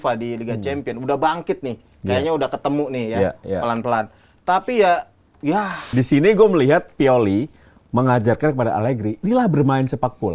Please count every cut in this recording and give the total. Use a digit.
1